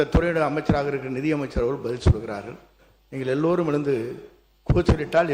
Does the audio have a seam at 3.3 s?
no; 0 cuts

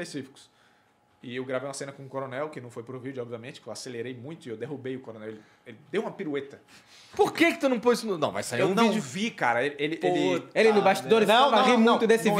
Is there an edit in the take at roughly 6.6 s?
no; 0 cuts

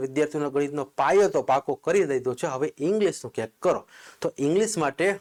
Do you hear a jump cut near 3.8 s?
no; 0 cuts

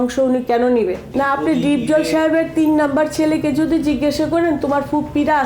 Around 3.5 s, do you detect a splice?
no; 1 cut; at 1.1 s

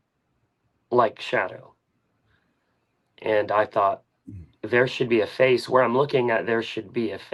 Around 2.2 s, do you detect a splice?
no; 0 cuts

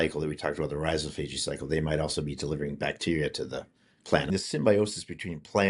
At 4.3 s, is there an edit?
yes; 1 cut; at 4.3 s

